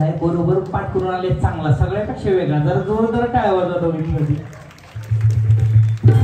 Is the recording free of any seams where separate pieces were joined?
yes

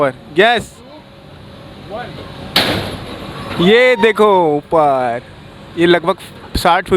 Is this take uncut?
yes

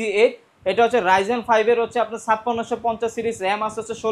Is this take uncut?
yes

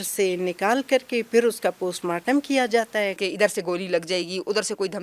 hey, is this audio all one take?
no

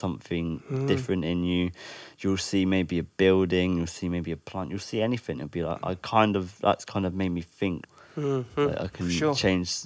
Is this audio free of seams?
no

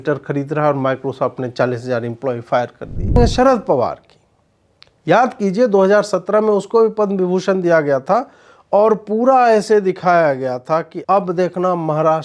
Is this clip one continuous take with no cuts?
no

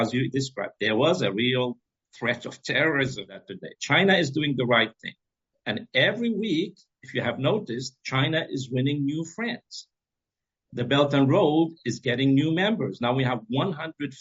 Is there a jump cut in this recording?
yes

